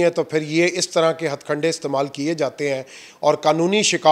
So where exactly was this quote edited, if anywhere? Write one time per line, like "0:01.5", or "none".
none